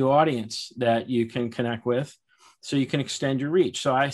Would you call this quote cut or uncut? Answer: uncut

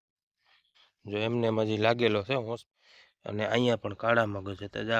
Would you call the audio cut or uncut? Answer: cut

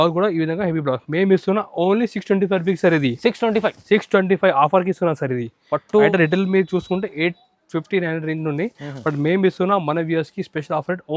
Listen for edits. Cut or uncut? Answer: cut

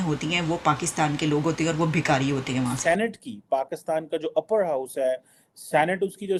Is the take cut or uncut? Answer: uncut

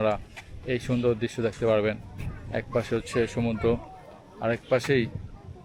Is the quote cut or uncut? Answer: uncut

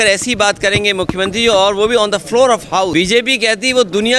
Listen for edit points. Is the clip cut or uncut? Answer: cut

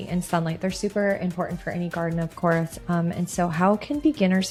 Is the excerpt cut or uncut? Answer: uncut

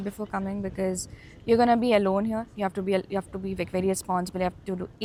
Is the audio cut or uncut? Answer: uncut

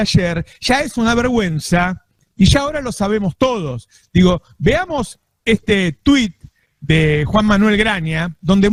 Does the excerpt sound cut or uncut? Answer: uncut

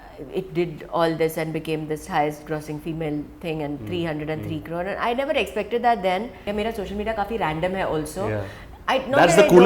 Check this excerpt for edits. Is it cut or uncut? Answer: cut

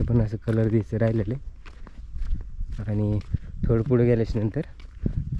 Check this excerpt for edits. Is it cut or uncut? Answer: uncut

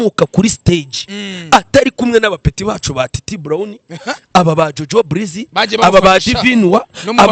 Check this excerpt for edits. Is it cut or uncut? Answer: uncut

